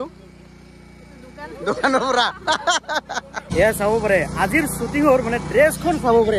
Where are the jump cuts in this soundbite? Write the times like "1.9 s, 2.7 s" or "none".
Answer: 3.5 s